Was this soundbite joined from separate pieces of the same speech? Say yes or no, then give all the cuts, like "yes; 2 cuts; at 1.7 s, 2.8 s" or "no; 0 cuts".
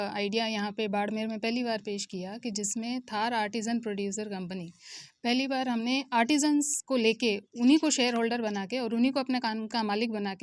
no; 0 cuts